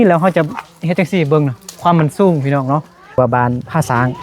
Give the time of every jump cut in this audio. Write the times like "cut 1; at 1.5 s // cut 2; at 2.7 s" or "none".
cut 1; at 3.2 s